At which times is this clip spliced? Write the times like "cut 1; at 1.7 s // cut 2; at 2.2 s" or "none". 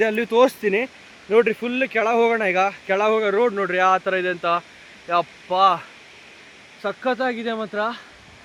none